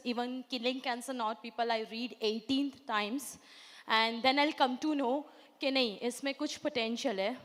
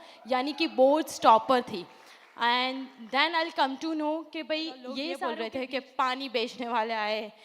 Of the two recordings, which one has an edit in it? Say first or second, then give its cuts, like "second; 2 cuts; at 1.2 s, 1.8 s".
second; 1 cut; at 5.2 s